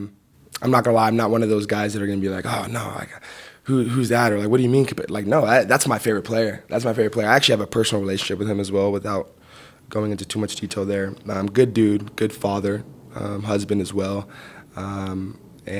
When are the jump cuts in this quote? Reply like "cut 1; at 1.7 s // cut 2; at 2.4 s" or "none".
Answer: none